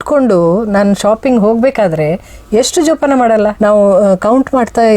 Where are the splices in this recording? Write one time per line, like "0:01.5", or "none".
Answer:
0:03.5